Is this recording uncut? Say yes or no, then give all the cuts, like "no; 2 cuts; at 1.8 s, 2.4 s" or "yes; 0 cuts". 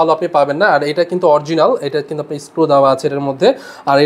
yes; 0 cuts